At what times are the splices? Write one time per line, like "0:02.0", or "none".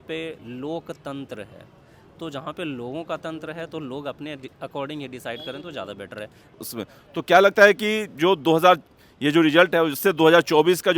0:06.6